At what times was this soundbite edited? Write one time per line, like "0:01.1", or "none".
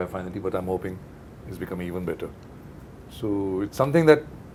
none